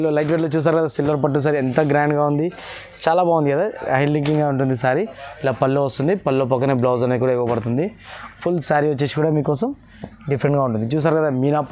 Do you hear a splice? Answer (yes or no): no